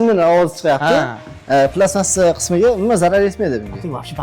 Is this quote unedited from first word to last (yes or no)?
yes